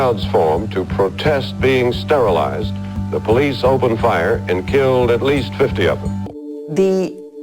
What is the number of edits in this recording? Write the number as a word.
one